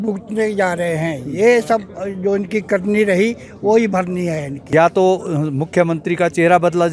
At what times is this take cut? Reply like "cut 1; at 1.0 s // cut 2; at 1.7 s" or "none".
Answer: cut 1; at 4.5 s